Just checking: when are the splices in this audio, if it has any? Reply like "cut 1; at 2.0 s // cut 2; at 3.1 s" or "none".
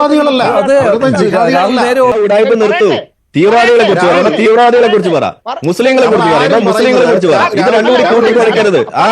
cut 1; at 2.2 s